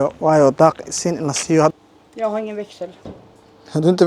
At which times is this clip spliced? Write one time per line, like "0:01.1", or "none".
0:01.7